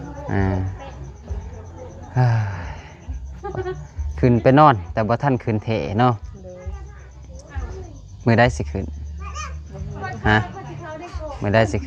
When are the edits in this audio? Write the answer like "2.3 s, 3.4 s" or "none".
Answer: none

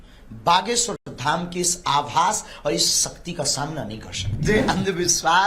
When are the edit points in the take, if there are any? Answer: 4.4 s

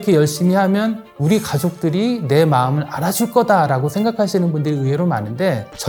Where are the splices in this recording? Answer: none

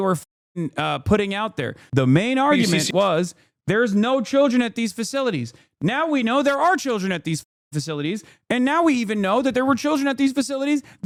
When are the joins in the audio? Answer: none

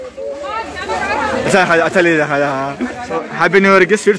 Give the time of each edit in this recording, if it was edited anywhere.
3.3 s

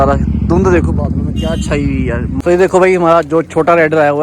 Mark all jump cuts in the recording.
2.3 s

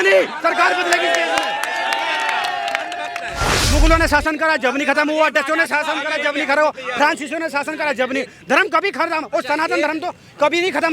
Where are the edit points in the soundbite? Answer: 3.5 s

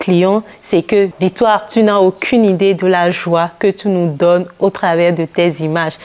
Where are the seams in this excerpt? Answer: 1.1 s

